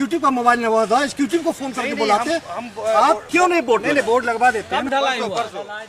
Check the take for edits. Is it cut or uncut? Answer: cut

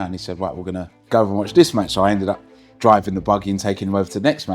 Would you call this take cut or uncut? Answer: cut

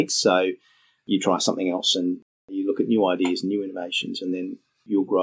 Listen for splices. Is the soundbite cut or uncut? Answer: uncut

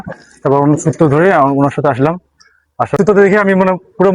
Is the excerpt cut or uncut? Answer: cut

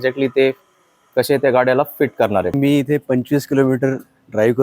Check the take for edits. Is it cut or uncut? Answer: cut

